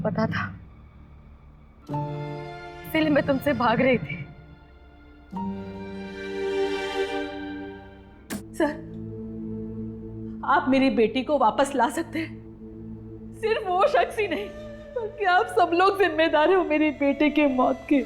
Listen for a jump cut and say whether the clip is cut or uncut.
cut